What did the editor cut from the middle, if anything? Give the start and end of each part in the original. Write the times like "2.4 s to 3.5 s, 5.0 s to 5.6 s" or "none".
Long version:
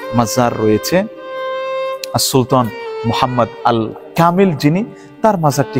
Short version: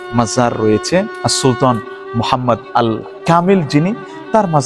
1.1 s to 2.0 s